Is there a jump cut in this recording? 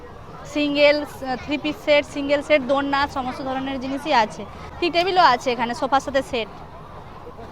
no; 0 cuts

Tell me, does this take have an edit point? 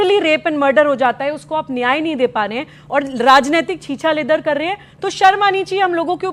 no; 0 cuts

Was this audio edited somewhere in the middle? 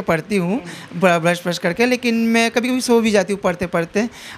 no; 0 cuts

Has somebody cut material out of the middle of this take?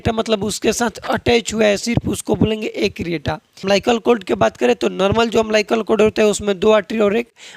yes; 1 cut; at 3.5 s

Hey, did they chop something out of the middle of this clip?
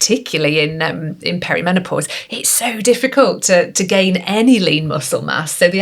no; 0 cuts

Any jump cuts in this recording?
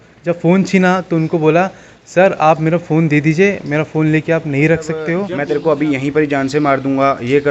yes; 1 cut; at 5.3 s

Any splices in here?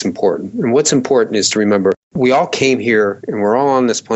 no; 0 cuts

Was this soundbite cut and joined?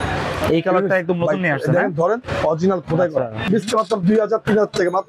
yes; 1 cut; at 3.4 s

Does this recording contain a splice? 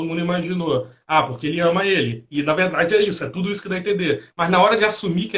no; 0 cuts

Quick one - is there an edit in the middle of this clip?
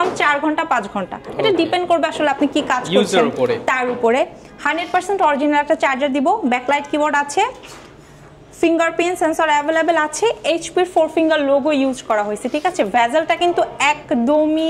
no; 0 cuts

